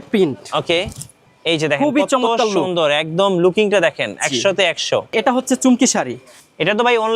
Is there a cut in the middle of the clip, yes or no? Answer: yes